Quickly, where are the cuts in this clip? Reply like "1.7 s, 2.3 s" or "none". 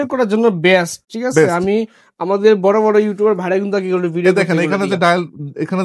none